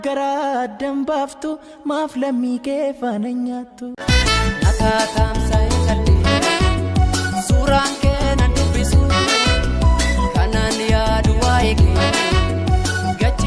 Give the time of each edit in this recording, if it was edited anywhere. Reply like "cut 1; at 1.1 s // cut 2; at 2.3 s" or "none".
cut 1; at 3.8 s